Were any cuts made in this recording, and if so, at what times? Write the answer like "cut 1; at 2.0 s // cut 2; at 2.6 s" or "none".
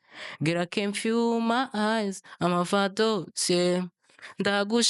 none

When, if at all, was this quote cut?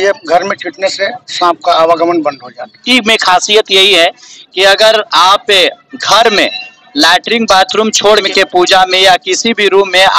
cut 1; at 2.8 s // cut 2; at 8.3 s

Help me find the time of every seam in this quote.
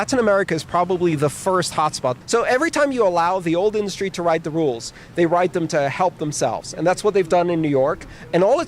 cut 1; at 2.2 s

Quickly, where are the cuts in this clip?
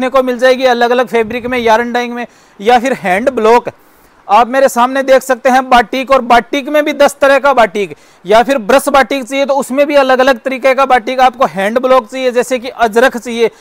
none

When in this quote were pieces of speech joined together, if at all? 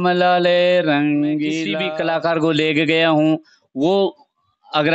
cut 1; at 1.7 s

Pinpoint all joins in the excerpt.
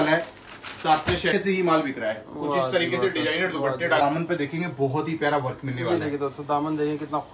cut 1; at 1.3 s // cut 2; at 4.0 s

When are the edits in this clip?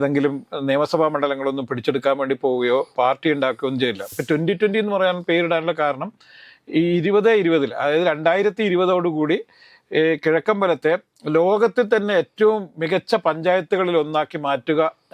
cut 1; at 4.0 s

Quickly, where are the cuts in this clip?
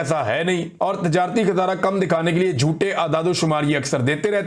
none

